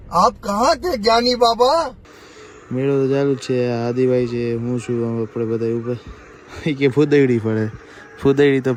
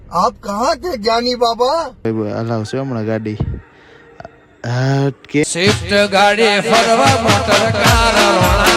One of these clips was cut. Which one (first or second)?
second